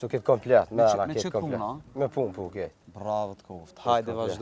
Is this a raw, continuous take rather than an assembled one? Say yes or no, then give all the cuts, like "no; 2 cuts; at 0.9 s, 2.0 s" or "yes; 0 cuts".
yes; 0 cuts